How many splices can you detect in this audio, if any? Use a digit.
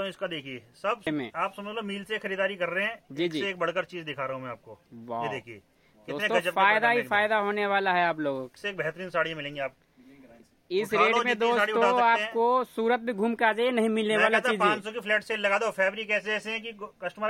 3